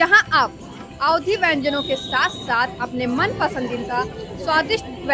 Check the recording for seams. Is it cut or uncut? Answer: uncut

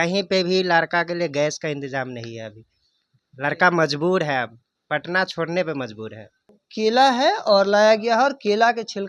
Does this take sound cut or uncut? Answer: cut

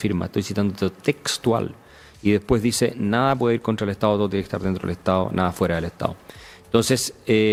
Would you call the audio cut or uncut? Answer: uncut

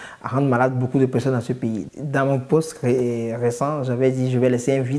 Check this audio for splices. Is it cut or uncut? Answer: cut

